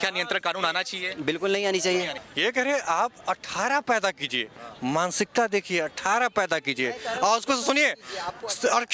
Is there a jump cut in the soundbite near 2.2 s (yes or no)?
yes